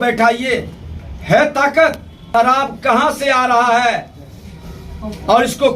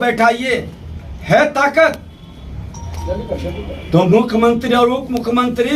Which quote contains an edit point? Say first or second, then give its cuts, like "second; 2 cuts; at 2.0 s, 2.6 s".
first; 1 cut; at 2.1 s